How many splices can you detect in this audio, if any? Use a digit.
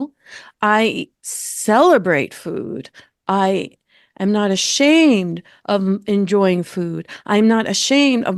0